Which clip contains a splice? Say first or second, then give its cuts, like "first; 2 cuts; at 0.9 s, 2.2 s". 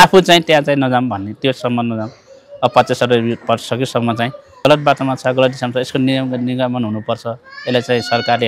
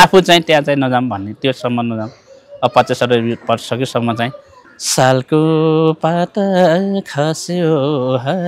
second; 1 cut; at 4.4 s